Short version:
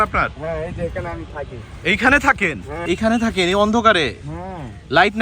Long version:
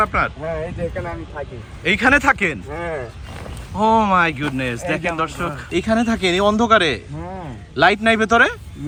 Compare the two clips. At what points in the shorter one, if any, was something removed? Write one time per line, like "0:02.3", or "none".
0:02.8